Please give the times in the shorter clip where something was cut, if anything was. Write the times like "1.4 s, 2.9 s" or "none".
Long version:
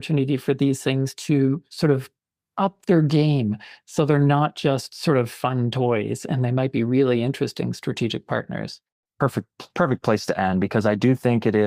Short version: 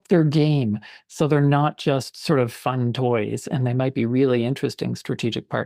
none